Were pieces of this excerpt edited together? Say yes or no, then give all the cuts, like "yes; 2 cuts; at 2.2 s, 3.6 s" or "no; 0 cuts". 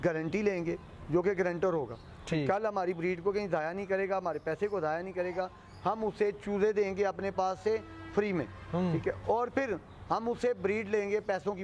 no; 0 cuts